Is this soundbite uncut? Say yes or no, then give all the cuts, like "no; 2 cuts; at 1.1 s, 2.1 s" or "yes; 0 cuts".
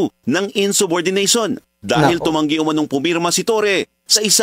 yes; 0 cuts